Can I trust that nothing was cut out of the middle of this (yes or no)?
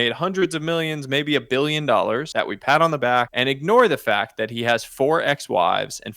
no